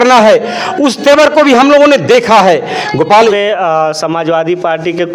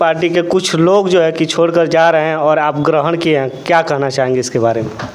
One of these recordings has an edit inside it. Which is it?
first; 1 cut; at 3.3 s

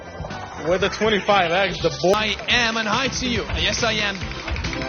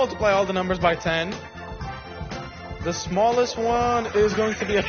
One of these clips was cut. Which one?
first; 1 cut; at 2.1 s

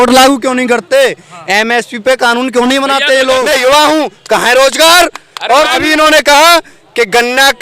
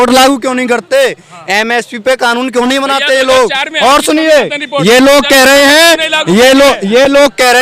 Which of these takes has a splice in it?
first; 2 cuts; at 3.5 s, 5.8 s

